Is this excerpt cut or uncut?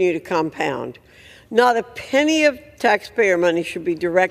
uncut